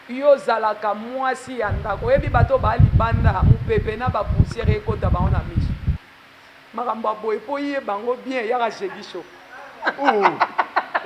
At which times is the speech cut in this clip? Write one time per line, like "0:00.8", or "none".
0:06.0